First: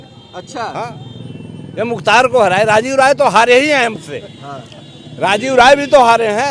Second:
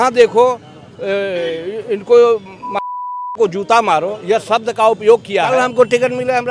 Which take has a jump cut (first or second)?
second